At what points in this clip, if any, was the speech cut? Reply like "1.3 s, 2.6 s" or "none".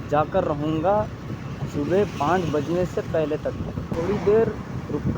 3.9 s